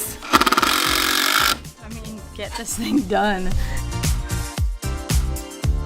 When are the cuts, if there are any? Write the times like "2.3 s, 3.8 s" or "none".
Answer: none